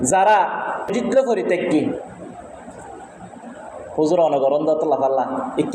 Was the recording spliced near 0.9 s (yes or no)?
yes